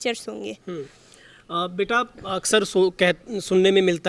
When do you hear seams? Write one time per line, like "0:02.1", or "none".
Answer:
none